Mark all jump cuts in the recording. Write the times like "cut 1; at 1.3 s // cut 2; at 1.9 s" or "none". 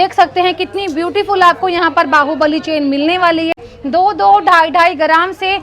cut 1; at 3.5 s